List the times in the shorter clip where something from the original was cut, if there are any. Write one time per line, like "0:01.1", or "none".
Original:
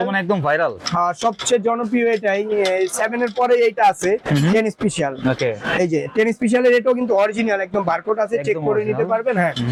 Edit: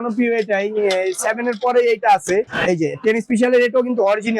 0:02.5

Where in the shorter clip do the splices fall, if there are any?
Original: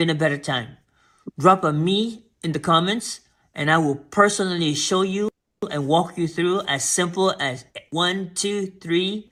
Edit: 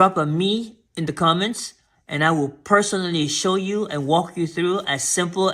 0:03.9

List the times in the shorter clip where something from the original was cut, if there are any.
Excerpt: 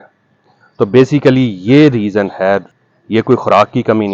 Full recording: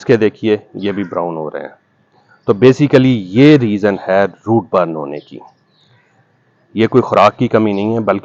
0:02.7

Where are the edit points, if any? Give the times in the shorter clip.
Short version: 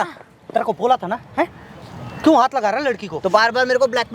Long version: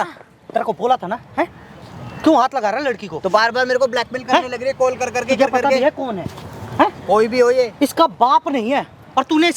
none

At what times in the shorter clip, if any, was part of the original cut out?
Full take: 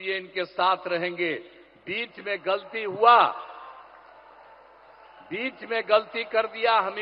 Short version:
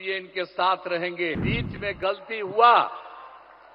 0:01.4

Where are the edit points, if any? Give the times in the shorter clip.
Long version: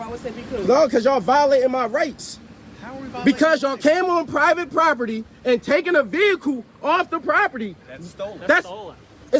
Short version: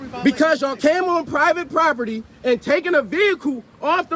none

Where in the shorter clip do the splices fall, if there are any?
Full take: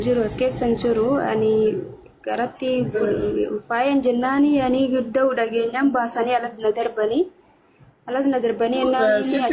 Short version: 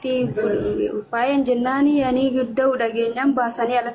none

